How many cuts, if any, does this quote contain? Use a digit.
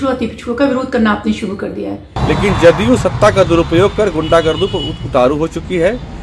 1